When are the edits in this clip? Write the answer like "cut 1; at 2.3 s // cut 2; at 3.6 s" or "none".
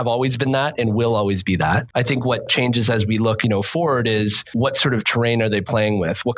cut 1; at 2.4 s // cut 2; at 3.4 s // cut 3; at 4.5 s

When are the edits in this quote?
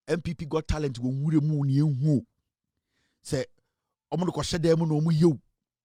none

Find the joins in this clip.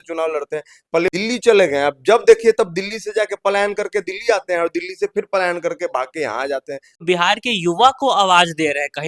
cut 1; at 1.1 s // cut 2; at 7.0 s

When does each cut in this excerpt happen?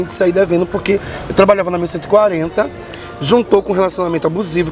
cut 1; at 2.8 s

